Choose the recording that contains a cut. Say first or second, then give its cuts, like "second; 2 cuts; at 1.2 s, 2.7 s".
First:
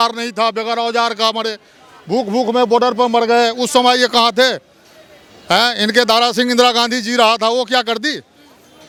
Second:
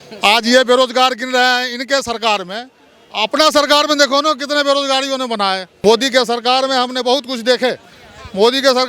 second; 1 cut; at 5.7 s